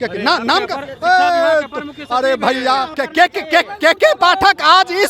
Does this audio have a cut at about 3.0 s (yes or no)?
yes